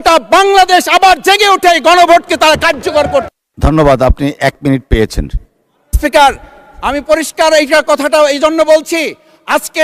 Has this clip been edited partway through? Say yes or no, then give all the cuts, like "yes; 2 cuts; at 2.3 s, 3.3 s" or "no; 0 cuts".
no; 0 cuts